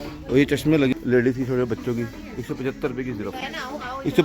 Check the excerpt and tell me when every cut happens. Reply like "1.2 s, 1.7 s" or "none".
0.9 s

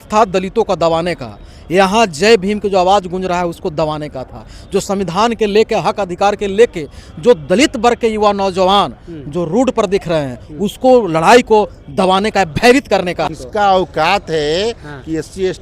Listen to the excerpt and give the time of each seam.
13.3 s

